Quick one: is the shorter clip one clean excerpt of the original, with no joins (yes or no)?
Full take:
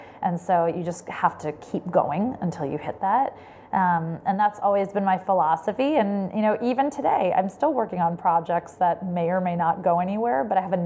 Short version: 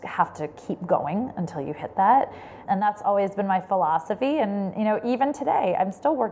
no